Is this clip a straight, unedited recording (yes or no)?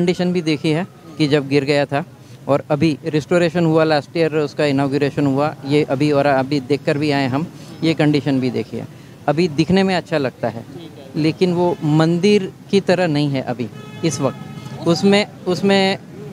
yes